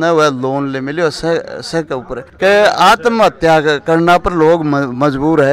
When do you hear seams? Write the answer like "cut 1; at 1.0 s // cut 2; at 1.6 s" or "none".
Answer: cut 1; at 2.2 s